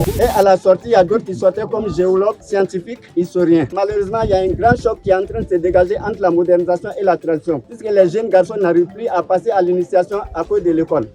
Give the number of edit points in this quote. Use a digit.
3